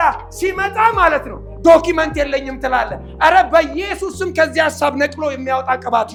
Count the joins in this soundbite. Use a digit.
0